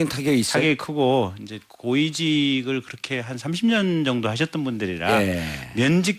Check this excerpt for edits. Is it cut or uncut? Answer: uncut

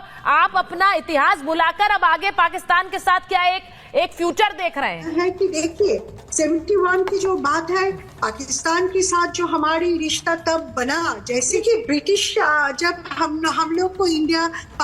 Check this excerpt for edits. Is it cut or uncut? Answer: cut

